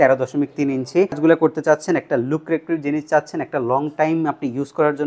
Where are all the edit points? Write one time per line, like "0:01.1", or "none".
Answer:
0:01.2